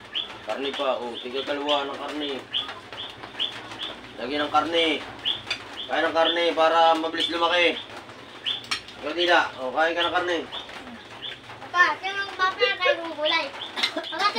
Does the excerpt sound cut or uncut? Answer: uncut